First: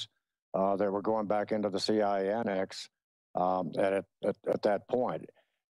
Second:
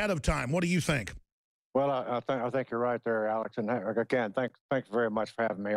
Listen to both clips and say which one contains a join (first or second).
first